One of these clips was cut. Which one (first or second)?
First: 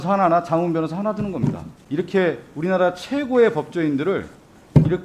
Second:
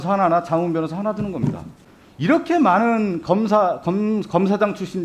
second